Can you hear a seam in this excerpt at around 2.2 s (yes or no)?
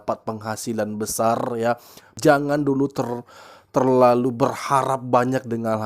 yes